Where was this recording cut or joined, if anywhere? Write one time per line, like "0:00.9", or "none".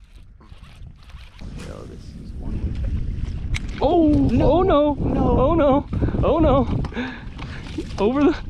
0:01.4